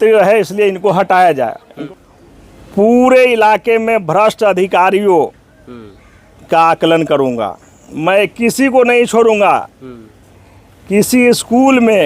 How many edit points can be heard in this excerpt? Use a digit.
1